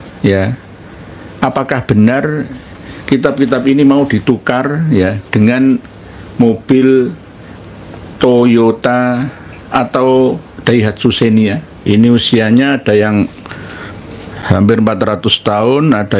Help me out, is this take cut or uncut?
cut